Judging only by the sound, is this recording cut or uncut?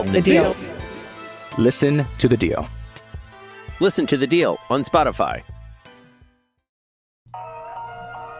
cut